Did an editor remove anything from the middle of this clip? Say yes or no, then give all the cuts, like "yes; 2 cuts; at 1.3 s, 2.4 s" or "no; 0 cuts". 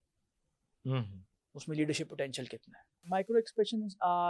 yes; 1 cut; at 3.0 s